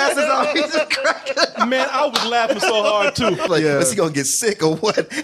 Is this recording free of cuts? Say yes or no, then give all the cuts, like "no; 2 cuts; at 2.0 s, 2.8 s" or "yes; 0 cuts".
no; 1 cut; at 3.5 s